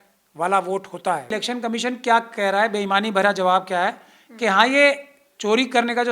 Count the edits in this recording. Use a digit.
1